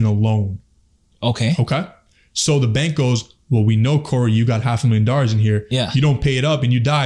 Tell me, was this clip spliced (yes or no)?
no